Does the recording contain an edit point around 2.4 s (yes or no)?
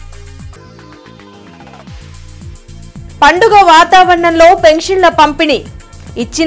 no